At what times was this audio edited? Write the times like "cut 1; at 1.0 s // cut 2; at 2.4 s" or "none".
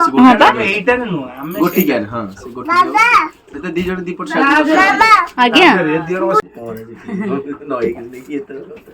cut 1; at 6.4 s